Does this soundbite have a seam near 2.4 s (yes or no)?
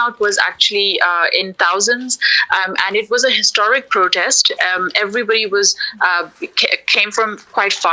no